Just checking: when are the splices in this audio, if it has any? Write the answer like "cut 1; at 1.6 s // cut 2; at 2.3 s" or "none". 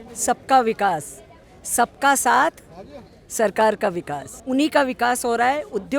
cut 1; at 4.4 s